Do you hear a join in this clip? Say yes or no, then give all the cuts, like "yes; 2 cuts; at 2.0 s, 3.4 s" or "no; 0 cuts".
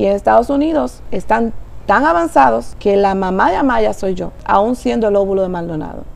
yes; 3 cuts; at 1.1 s, 2.7 s, 4.3 s